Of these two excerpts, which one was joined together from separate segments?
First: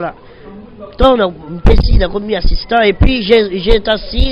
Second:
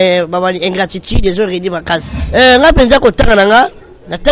second; 1 cut; at 2.1 s

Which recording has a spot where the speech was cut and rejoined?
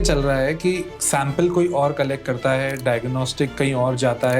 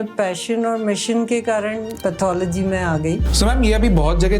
second; 2 cuts; at 1.9 s, 3.3 s

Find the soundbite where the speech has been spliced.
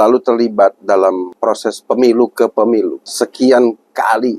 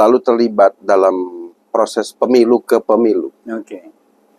first; 2 cuts; at 1.3 s, 3.0 s

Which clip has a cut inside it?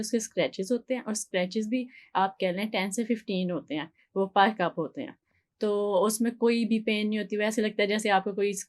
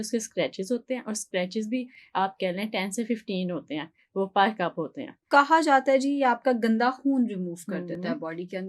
second; 1 cut; at 5.2 s

